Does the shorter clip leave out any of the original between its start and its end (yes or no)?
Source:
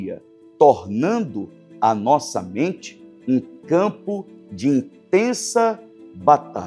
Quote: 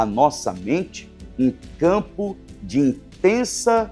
no